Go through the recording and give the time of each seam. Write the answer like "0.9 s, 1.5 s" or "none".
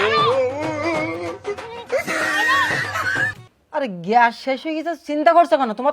3.3 s